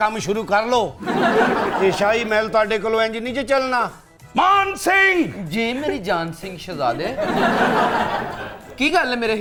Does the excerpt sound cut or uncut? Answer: uncut